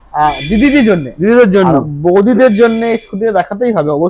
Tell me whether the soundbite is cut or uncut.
uncut